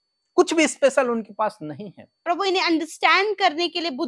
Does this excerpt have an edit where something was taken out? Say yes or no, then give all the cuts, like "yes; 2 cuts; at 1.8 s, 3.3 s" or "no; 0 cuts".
yes; 1 cut; at 2.2 s